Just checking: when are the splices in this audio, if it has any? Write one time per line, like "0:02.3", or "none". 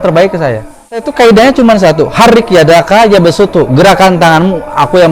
0:01.1